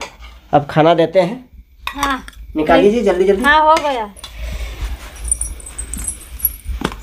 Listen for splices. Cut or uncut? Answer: cut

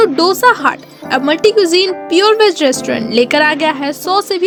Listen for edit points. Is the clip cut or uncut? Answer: uncut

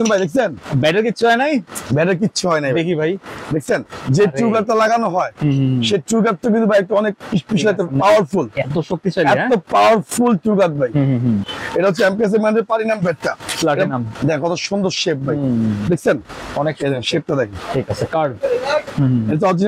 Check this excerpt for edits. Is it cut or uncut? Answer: cut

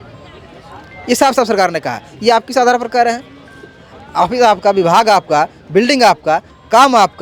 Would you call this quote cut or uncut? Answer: uncut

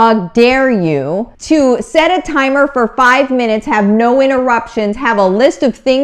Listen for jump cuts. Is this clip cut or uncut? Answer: cut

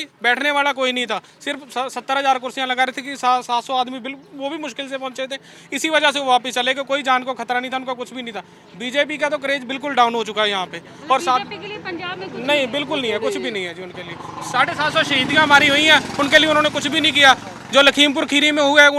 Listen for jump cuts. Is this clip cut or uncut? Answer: uncut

